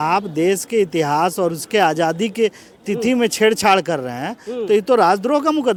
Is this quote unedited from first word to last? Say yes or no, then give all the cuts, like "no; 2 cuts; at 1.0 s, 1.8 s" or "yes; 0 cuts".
yes; 0 cuts